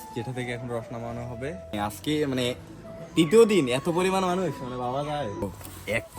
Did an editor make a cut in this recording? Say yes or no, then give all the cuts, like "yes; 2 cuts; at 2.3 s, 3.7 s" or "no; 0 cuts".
yes; 2 cuts; at 1.7 s, 5.4 s